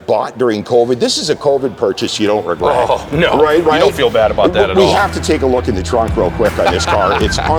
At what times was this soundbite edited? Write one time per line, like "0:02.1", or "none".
none